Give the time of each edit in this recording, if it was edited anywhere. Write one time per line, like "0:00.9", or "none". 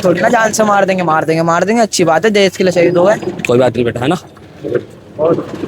0:03.4